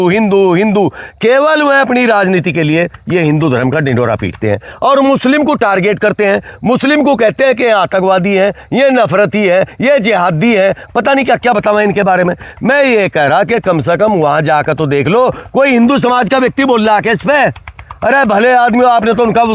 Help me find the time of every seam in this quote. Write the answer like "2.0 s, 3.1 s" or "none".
none